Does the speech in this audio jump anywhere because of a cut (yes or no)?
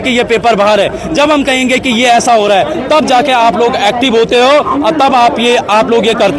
no